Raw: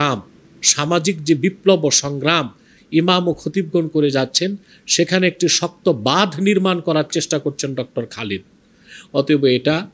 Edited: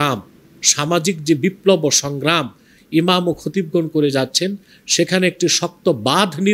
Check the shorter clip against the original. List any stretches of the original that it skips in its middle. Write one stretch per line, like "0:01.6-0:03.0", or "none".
none